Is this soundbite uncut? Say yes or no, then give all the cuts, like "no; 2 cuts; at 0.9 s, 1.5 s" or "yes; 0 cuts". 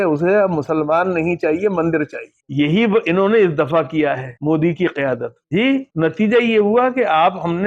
yes; 0 cuts